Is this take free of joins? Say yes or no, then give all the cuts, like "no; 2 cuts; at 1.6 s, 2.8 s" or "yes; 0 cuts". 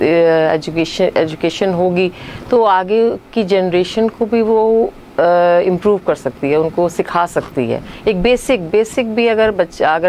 no; 2 cuts; at 2.3 s, 3.1 s